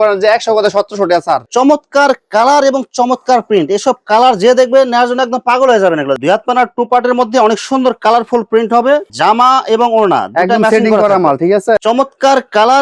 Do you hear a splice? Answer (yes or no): yes